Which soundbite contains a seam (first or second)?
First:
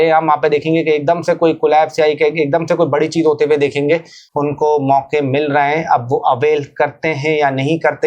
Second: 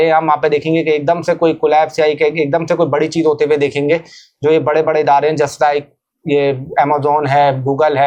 first